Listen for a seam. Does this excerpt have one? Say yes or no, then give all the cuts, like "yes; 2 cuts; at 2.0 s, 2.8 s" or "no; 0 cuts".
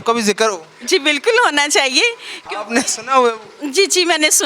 no; 0 cuts